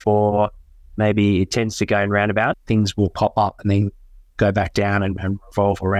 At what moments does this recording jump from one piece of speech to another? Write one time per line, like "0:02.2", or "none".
0:02.6